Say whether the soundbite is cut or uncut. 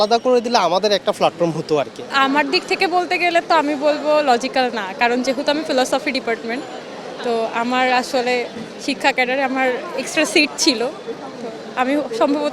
cut